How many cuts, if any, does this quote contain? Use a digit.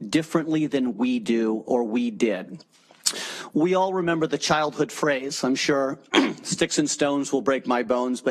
0